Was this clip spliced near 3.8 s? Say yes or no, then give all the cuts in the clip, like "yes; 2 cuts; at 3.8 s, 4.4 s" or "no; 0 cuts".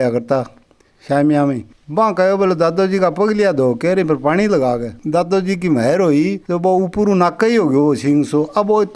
no; 2 cuts; at 1.7 s, 5.0 s